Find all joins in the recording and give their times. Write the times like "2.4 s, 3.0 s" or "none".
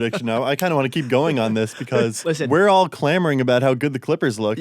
2.2 s